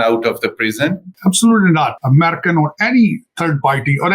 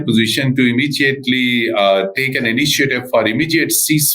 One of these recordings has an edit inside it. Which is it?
first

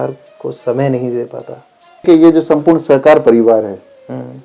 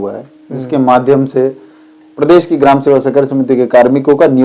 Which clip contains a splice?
first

